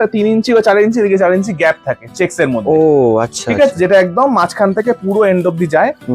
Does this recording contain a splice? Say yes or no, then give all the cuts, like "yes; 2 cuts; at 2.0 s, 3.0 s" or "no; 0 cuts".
no; 0 cuts